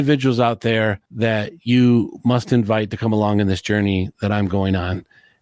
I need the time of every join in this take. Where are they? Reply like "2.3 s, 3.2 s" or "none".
1.0 s